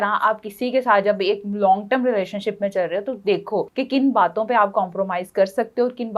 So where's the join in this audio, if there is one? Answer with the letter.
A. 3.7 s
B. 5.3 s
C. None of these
A